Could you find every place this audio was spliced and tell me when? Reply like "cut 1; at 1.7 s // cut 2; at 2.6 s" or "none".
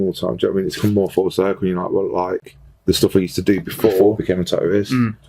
cut 1; at 4.2 s